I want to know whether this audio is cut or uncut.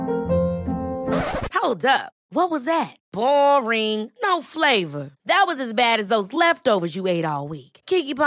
uncut